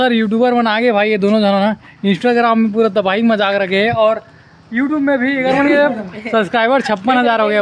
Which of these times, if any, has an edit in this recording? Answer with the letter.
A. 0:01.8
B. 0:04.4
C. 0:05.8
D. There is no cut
D